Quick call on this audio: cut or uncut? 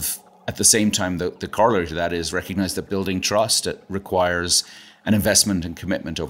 uncut